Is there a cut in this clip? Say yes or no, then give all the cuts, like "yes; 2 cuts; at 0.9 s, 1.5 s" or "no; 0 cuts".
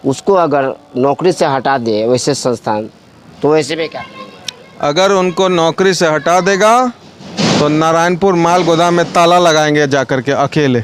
no; 0 cuts